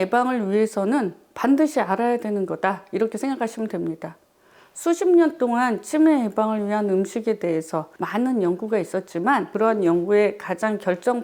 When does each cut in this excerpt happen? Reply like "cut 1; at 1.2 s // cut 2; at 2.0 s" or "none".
cut 1; at 8.0 s // cut 2; at 9.5 s